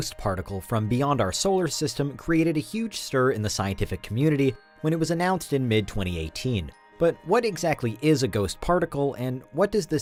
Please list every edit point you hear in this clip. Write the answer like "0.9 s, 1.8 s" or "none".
none